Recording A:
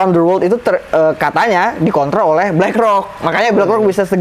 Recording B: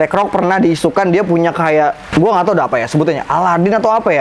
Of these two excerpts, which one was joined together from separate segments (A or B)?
B